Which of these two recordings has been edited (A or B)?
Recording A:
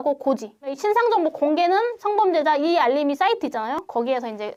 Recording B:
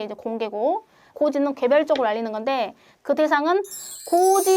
B